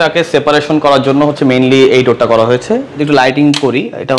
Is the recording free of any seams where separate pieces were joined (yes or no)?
no